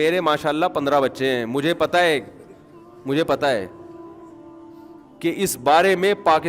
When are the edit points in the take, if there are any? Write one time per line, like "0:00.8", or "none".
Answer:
0:03.7
0:05.2